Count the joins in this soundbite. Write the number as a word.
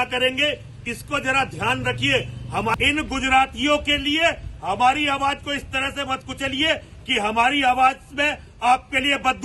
one